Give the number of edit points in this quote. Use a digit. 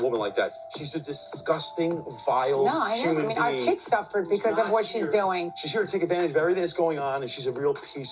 0